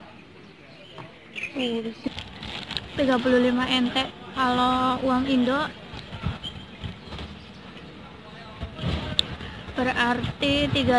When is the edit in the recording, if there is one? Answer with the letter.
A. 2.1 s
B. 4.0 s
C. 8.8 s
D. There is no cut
A